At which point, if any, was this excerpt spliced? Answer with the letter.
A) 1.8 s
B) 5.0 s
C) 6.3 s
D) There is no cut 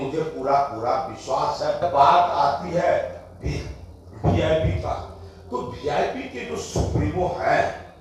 A